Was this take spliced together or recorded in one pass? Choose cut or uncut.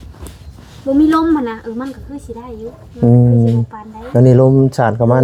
uncut